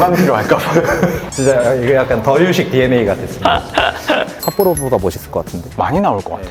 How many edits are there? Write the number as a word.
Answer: one